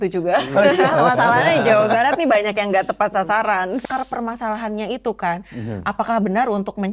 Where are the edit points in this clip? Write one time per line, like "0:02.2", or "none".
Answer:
0:03.8